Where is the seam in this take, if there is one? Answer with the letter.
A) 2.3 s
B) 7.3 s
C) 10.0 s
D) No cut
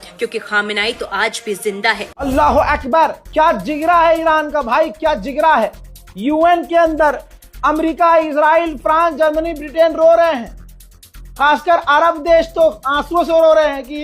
A